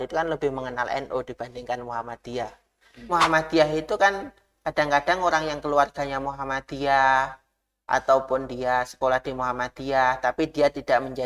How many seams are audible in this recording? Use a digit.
1